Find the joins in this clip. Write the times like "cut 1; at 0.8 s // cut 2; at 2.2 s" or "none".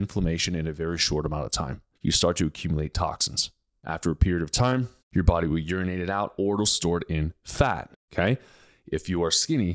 cut 1; at 1.8 s // cut 2; at 3.7 s // cut 3; at 5.0 s